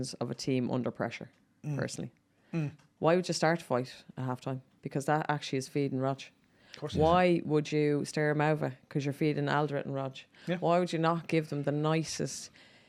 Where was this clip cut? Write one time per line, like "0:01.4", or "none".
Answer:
none